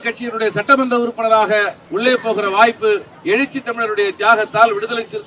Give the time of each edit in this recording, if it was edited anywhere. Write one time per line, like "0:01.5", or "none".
0:01.8
0:03.1